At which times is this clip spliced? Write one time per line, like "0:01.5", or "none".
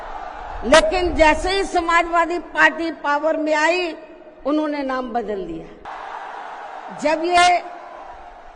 0:05.9

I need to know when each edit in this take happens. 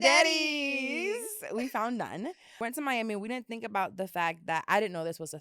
0:02.5

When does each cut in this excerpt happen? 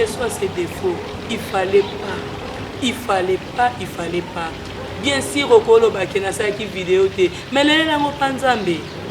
none

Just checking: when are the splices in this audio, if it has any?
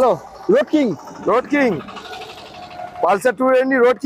none

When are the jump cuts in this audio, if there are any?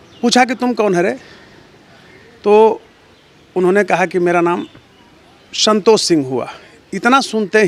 none

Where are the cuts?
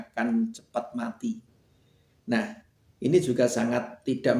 none

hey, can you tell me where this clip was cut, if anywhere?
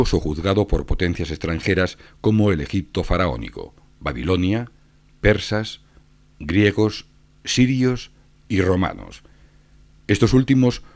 0:01.5

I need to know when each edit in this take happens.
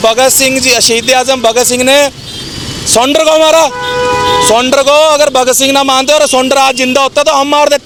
none

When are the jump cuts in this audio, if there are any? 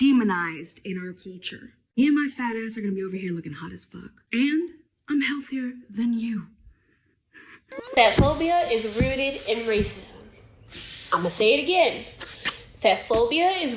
0:07.8

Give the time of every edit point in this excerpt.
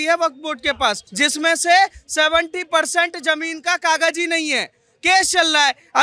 0:01.1

